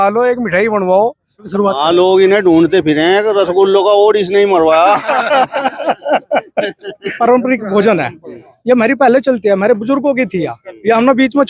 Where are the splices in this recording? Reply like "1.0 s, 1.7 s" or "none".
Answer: 1.5 s, 7.2 s